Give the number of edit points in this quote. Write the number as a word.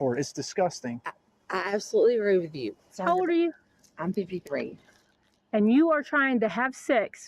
one